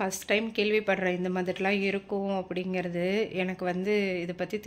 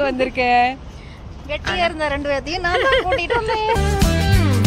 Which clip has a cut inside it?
second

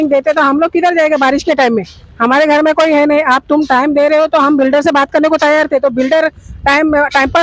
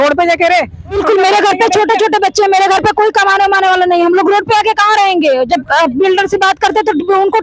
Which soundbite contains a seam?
second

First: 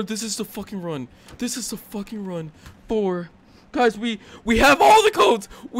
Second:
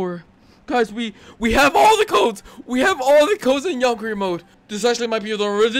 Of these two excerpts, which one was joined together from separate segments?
second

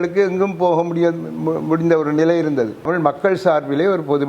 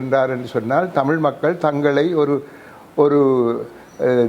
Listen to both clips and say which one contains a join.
first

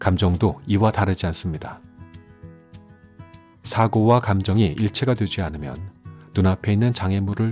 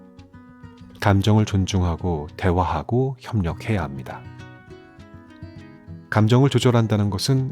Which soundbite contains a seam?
second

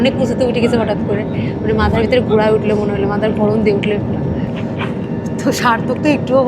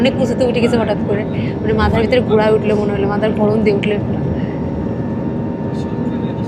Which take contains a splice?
first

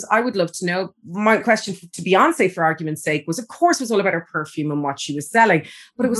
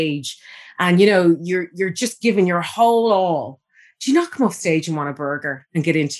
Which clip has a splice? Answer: first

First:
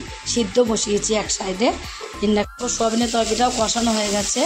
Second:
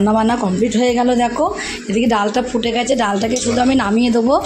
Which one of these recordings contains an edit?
first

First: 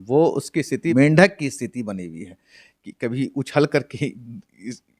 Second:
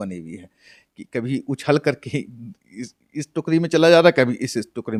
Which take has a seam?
first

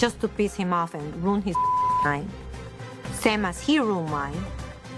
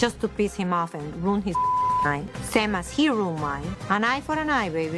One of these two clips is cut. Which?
second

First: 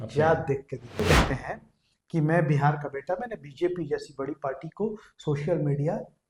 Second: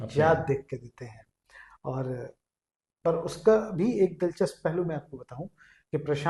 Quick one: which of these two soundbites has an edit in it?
first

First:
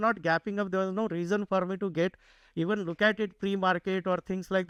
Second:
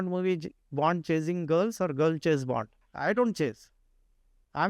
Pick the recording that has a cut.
second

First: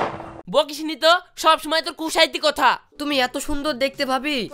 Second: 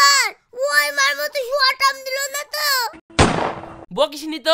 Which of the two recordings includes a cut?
first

